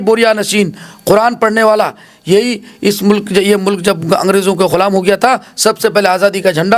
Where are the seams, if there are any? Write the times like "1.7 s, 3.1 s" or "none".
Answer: none